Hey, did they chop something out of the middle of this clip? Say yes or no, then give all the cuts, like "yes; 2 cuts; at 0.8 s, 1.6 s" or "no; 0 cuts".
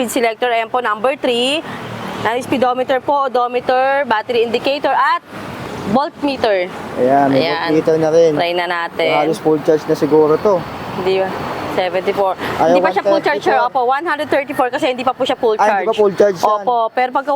no; 0 cuts